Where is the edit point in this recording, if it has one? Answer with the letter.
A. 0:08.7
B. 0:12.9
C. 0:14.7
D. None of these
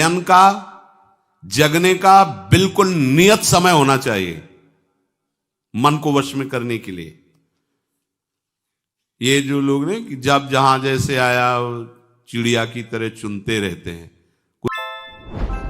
C